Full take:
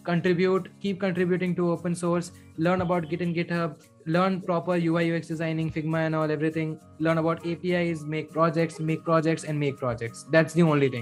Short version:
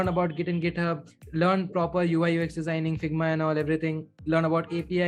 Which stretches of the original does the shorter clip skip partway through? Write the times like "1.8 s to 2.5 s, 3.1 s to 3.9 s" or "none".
none